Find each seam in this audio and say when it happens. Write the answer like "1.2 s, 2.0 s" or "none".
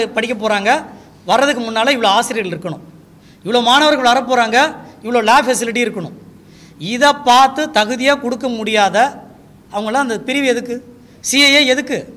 none

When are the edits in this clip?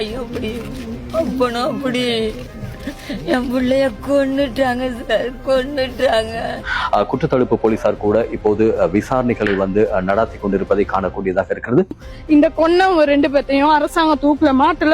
6.7 s, 12.1 s

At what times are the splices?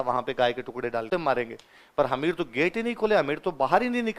1.1 s

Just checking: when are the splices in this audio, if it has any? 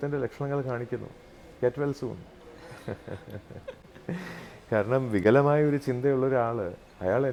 none

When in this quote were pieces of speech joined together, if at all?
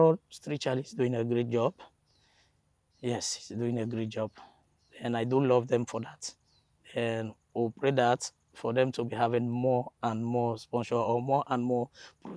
none

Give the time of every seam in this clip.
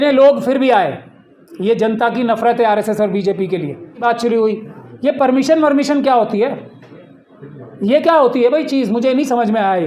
4.0 s

